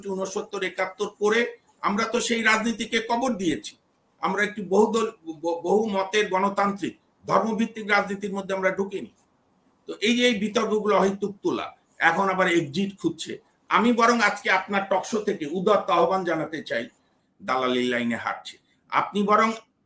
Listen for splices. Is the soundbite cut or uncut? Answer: cut